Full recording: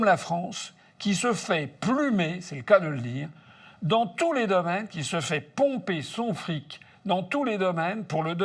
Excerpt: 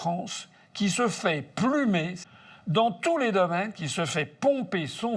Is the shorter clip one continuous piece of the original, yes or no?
no